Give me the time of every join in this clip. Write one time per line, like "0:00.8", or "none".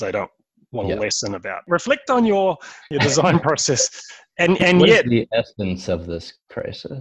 0:01.6
0:02.9